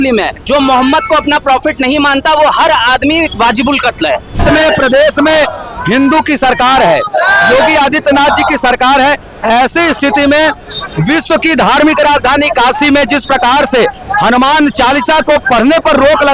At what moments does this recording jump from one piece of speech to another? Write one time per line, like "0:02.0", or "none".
0:04.4